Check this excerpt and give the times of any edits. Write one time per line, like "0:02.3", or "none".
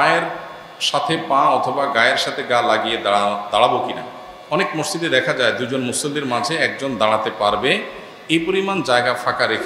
none